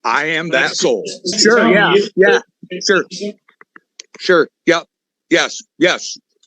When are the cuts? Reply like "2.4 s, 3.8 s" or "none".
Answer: 1.3 s